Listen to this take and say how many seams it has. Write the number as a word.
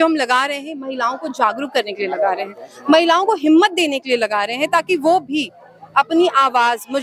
zero